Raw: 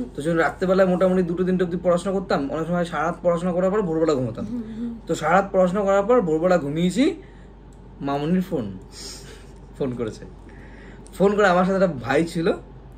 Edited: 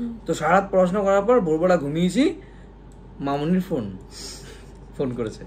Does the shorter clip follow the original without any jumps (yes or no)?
yes